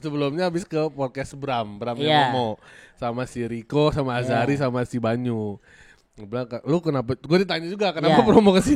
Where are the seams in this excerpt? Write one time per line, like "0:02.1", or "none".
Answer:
none

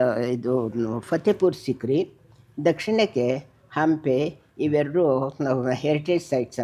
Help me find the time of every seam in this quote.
none

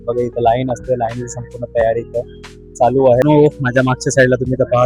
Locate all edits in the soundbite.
0:03.2

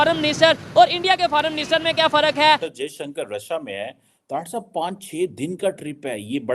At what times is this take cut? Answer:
0:02.7

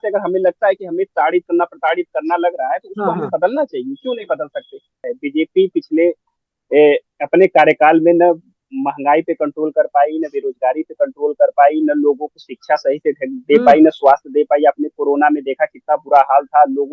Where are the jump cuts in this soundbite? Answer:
0:05.1

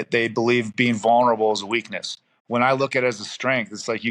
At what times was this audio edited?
none

